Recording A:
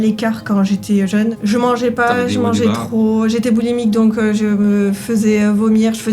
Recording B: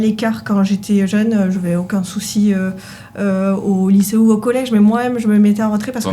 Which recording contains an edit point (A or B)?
A